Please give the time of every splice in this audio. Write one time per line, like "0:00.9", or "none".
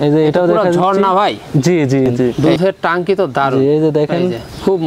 0:02.4